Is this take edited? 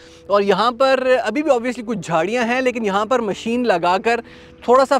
no; 0 cuts

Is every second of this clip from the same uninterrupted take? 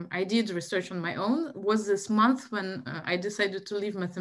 yes; 0 cuts

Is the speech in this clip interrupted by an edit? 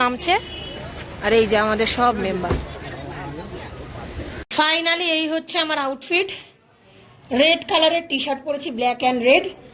yes; 1 cut; at 4.4 s

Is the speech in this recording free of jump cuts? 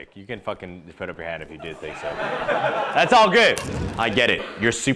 no; 1 cut; at 3.9 s

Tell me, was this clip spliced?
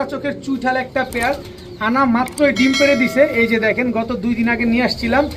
no; 0 cuts

